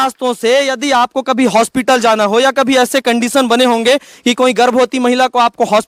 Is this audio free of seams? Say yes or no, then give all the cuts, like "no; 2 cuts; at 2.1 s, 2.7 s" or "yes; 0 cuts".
yes; 0 cuts